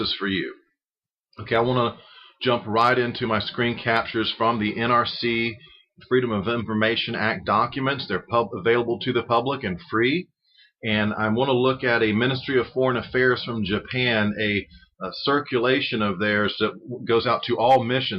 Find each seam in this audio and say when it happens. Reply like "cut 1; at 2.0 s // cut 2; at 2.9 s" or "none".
none